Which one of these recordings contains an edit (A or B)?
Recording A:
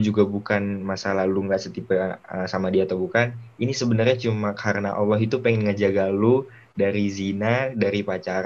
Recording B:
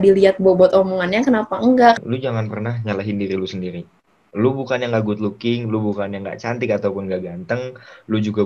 B